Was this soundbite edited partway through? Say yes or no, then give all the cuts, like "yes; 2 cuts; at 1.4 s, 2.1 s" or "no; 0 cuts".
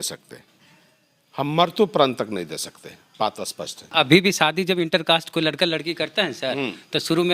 yes; 1 cut; at 3.9 s